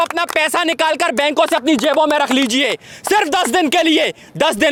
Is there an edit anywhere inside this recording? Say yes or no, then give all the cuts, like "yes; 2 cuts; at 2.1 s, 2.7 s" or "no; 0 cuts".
no; 0 cuts